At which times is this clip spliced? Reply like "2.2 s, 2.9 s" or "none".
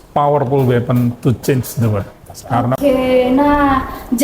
2.8 s

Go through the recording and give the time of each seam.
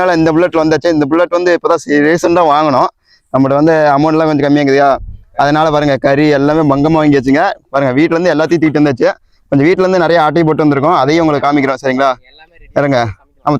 none

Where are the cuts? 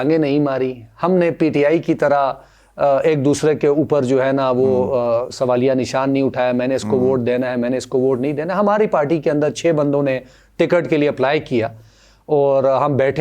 none

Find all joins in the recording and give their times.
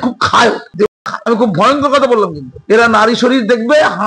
0.9 s

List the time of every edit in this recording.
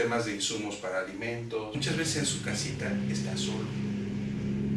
1.7 s

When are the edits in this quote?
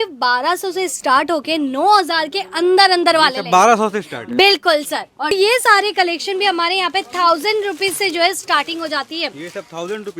5.3 s

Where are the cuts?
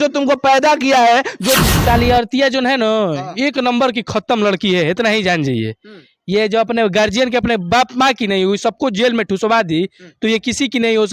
1.6 s

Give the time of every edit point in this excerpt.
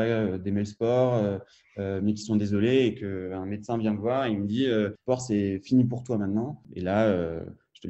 5.0 s, 6.6 s

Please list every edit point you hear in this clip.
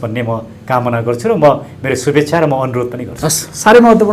none

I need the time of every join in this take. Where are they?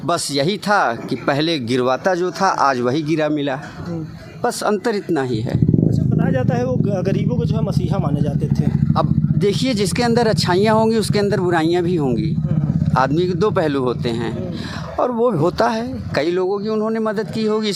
none

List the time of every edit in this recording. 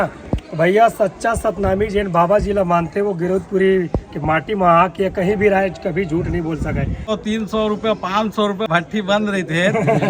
7.1 s, 8.7 s

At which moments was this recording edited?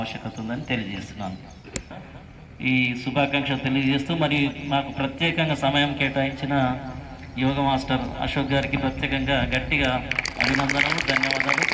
none

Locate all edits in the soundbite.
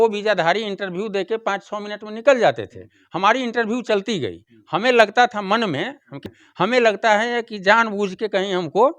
6.3 s

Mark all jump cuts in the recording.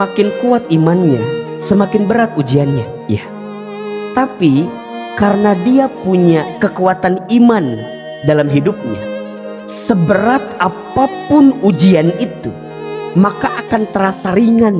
12.5 s

